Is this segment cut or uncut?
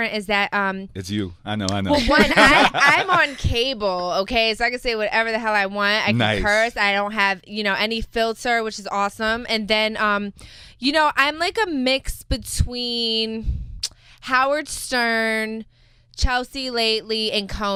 uncut